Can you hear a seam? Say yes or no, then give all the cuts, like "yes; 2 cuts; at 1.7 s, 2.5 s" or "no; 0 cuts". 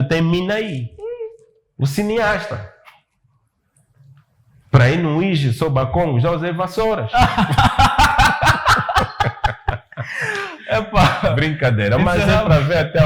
no; 0 cuts